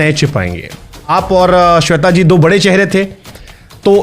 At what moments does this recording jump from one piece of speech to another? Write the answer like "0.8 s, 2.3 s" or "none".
1.1 s